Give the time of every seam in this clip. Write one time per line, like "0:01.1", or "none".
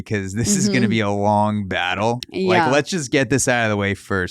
0:02.3